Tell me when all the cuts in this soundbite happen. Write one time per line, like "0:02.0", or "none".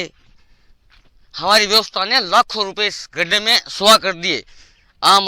none

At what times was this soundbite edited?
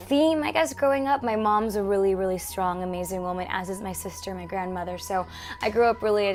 none

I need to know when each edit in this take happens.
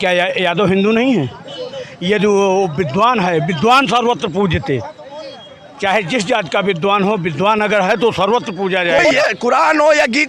0:09.0

